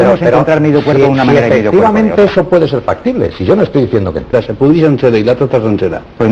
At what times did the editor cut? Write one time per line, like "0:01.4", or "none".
0:04.3

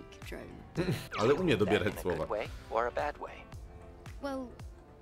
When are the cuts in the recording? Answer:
0:01.1

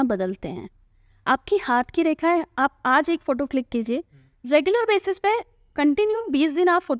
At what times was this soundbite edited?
none

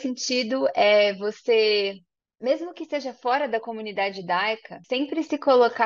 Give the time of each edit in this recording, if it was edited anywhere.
0:04.7

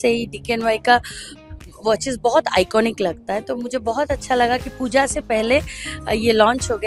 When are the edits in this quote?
none

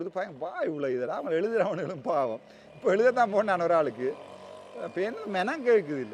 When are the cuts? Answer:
none

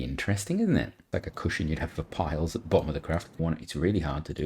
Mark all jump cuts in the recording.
0:01.0
0:03.3

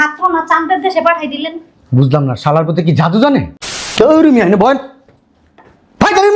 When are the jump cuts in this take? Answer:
0:03.8

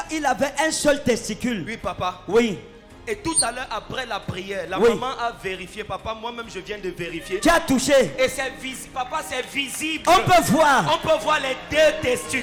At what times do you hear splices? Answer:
none

